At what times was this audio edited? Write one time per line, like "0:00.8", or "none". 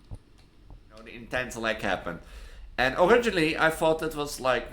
0:01.2

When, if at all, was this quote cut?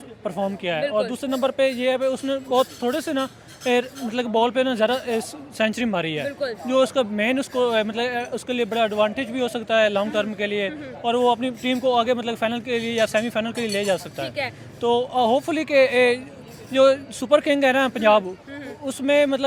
none

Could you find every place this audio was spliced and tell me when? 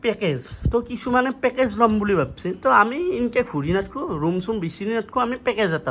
none

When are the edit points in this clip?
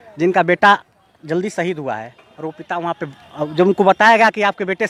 none

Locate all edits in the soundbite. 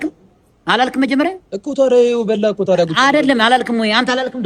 none

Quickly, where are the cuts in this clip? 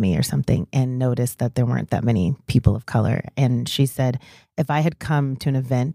none

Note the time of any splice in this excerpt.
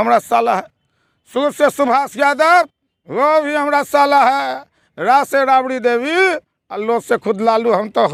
none

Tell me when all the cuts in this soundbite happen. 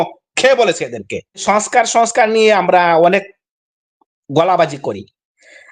0:01.4

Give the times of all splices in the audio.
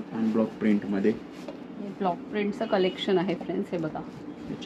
none

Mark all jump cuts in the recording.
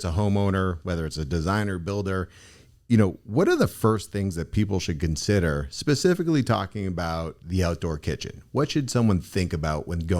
none

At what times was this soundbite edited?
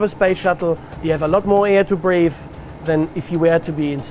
0:00.9
0:03.1

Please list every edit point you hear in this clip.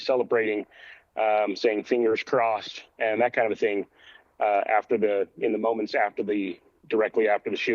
none

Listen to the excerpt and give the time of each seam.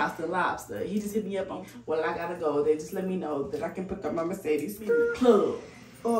0:01.6
0:05.0

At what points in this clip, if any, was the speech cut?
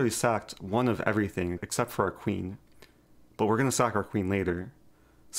0:01.6

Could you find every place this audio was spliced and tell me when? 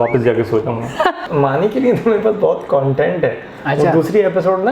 0:01.2

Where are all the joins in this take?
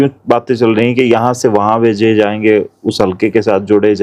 none

